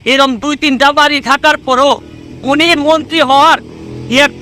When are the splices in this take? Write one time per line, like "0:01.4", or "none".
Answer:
none